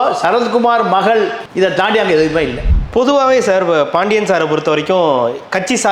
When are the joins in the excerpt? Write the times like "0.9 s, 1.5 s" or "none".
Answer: 2.6 s